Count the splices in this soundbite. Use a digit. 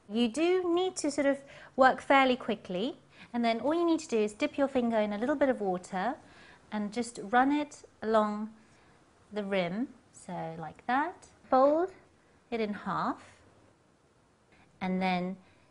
1